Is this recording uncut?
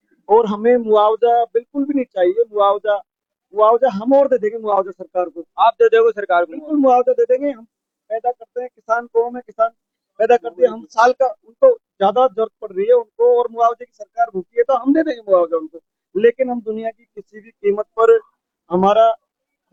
yes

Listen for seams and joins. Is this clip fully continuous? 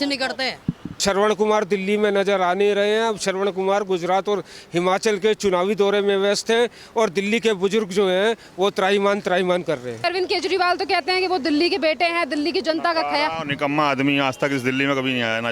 no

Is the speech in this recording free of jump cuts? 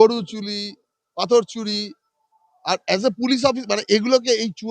yes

